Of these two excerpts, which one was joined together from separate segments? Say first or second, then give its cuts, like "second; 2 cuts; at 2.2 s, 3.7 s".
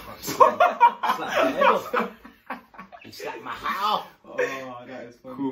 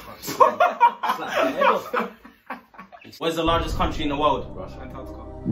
second; 1 cut; at 3.1 s